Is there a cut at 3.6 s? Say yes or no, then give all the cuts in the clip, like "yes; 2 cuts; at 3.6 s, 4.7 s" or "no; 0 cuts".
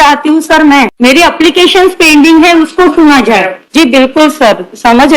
yes; 2 cuts; at 0.9 s, 3.6 s